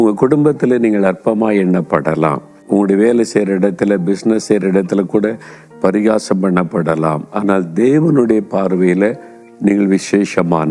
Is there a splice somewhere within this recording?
no; 0 cuts

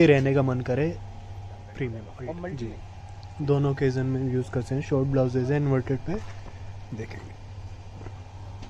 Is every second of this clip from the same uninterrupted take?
no; 1 cut; at 2.5 s

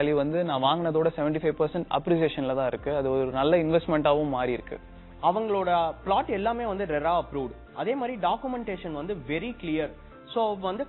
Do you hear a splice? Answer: no; 0 cuts

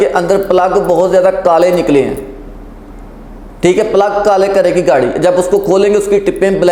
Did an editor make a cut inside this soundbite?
no; 0 cuts

